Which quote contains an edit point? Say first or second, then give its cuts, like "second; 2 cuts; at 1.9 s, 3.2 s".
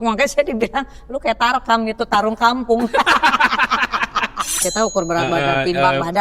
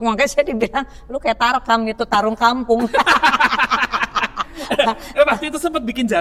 first; 1 cut; at 4.6 s